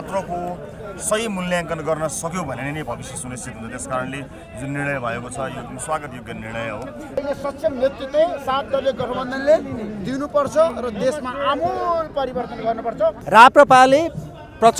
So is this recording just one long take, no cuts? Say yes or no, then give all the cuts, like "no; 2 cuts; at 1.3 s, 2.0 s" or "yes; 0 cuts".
no; 2 cuts; at 7.2 s, 13.2 s